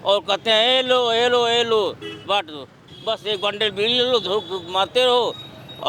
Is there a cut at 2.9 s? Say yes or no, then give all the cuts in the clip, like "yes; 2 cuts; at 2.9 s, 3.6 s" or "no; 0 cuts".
yes; 1 cut; at 2.9 s